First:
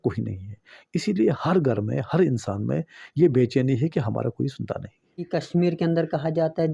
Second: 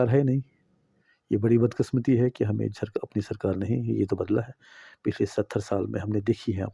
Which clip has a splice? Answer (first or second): first